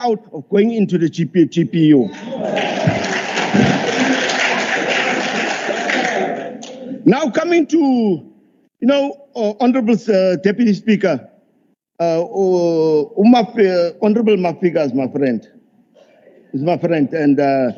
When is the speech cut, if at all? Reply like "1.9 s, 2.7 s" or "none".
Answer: none